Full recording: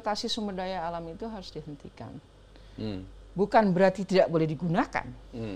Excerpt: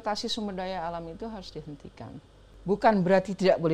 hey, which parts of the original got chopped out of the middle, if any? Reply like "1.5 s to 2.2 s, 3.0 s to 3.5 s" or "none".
2.5 s to 3.2 s